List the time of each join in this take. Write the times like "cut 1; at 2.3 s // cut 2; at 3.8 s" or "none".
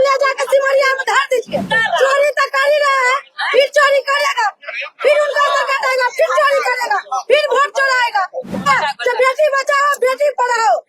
cut 1; at 1.7 s // cut 2; at 8.7 s